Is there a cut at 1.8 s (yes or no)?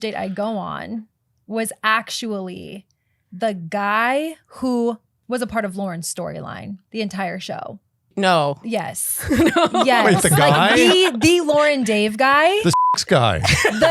no